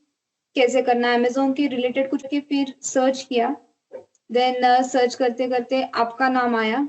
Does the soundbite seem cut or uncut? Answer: cut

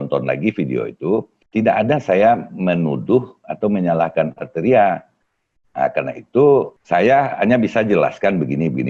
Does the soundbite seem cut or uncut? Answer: cut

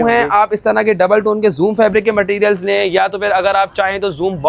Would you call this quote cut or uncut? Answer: uncut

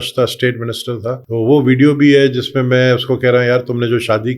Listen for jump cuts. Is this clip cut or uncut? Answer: cut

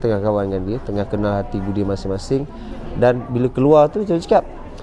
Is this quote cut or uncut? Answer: uncut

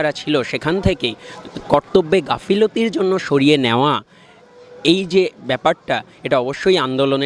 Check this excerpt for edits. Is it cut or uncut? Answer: uncut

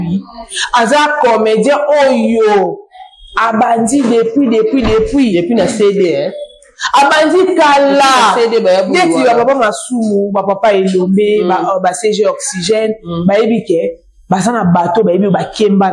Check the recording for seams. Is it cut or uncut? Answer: uncut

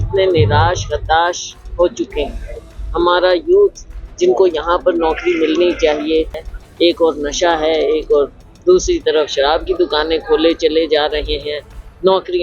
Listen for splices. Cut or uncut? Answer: cut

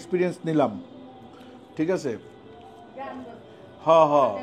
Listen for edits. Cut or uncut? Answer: uncut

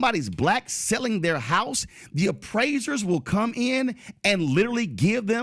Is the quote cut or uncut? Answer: cut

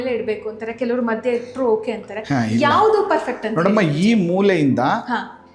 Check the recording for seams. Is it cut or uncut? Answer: uncut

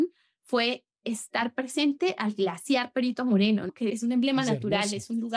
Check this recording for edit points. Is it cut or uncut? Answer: uncut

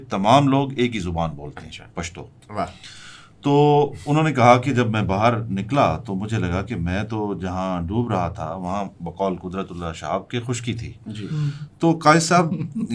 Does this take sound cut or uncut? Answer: uncut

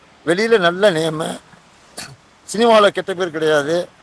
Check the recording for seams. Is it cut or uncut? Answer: uncut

